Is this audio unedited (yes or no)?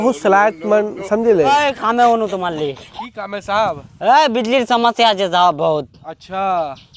no